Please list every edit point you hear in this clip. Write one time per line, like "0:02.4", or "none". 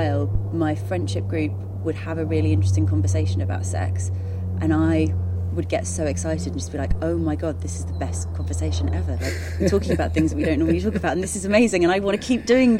none